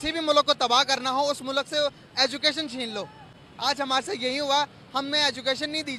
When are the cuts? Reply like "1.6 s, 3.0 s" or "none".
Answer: none